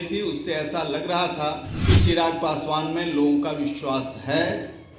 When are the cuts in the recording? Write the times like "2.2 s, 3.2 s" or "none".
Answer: 1.7 s